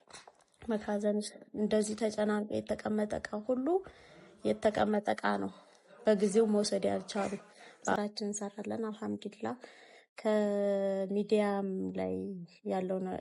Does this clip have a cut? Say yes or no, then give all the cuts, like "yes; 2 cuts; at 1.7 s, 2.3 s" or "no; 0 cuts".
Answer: yes; 1 cut; at 7.6 s